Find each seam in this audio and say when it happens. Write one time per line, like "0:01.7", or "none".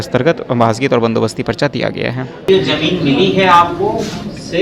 0:02.5